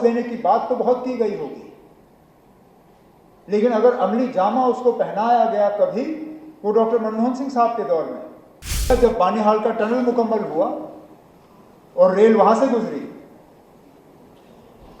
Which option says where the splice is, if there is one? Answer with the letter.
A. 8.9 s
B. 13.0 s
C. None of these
A